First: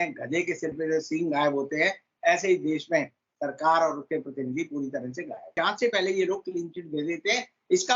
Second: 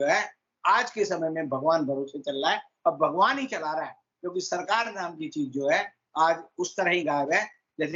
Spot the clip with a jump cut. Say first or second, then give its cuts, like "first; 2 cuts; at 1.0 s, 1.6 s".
first; 1 cut; at 5.5 s